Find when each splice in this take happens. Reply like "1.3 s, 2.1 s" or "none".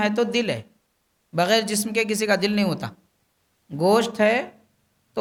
none